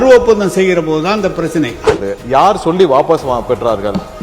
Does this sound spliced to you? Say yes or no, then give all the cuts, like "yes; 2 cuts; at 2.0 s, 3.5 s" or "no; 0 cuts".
yes; 1 cut; at 1.9 s